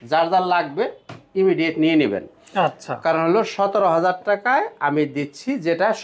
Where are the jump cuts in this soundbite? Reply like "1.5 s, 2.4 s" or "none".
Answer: none